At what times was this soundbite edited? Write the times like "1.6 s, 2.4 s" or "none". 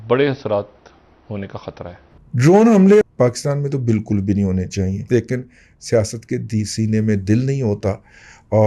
2.1 s, 3.1 s, 5.0 s